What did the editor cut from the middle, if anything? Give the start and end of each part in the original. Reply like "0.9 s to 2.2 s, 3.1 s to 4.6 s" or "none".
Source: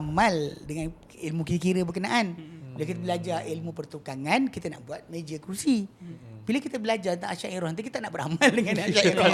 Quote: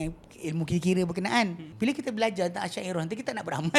2.4 s to 6.3 s